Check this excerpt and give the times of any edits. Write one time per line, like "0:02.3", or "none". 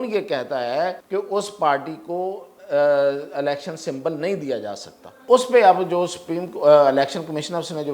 0:01.0
0:05.2